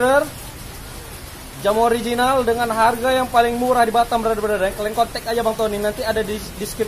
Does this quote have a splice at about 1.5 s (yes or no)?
no